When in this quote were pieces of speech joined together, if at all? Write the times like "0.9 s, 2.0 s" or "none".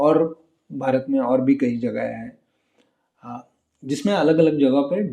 none